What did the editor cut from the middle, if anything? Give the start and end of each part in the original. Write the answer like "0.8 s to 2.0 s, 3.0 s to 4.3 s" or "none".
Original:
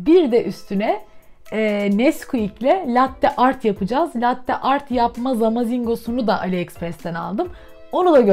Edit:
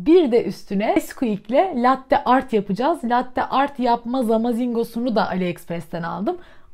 1.0 s to 2.1 s

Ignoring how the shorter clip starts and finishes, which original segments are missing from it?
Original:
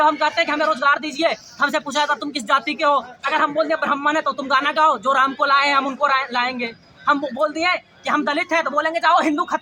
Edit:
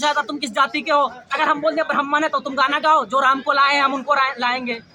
none

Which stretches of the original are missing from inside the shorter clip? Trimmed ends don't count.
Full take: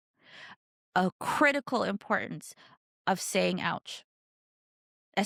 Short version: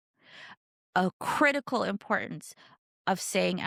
none

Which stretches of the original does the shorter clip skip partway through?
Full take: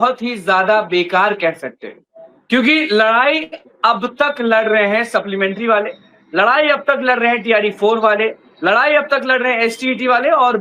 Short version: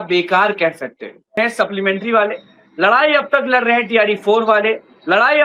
2.2 s to 4.9 s

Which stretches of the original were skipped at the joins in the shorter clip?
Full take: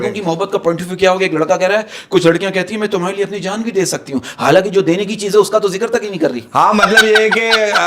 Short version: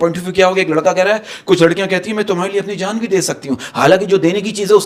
none

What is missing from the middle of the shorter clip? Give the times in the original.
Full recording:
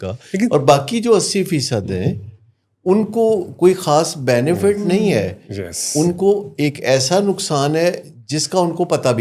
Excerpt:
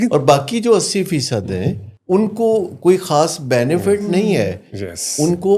2.3 s to 2.6 s

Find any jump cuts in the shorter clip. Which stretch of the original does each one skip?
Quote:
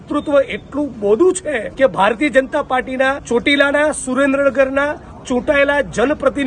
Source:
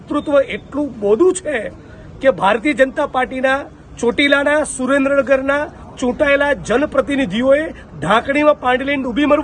1.6 s to 2.1 s, 3.6 s to 3.9 s

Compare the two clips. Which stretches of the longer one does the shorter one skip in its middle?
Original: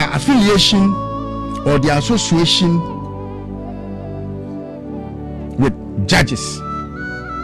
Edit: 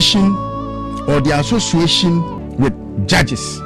3.0 s to 5.4 s

